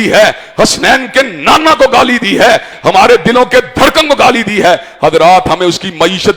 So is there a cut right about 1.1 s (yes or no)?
no